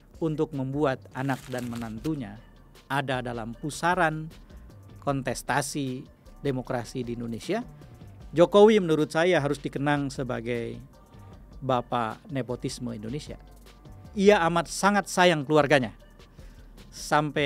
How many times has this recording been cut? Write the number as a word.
one